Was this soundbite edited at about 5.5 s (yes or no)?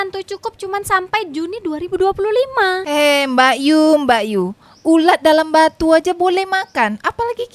no